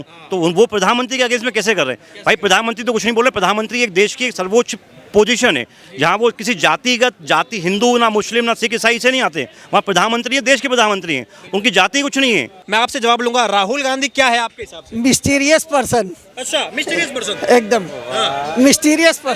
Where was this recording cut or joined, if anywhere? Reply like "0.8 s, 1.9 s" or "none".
12.6 s